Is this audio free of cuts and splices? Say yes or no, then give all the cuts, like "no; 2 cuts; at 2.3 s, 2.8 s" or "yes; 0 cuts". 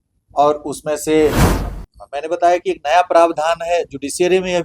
no; 1 cut; at 1.7 s